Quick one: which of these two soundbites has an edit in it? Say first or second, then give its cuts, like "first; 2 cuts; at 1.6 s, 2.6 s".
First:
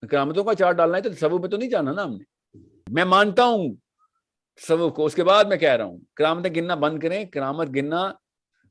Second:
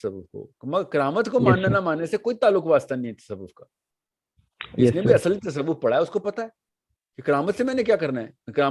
first; 1 cut; at 2.8 s